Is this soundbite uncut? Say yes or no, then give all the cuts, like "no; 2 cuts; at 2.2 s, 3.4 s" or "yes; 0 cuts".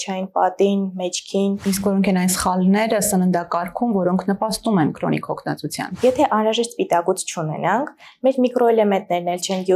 no; 2 cuts; at 1.7 s, 6.0 s